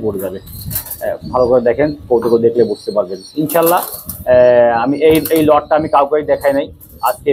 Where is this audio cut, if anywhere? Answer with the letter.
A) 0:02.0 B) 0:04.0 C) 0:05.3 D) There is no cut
D